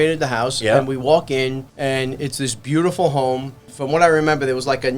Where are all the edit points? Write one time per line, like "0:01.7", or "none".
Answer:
0:01.7
0:03.7